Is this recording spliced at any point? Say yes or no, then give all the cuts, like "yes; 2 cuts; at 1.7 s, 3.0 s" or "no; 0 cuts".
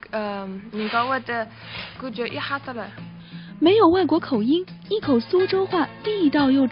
yes; 1 cut; at 4.4 s